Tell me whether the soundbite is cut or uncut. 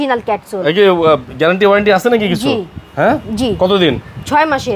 uncut